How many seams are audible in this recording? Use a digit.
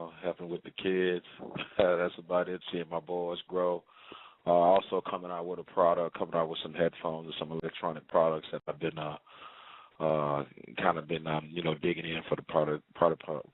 1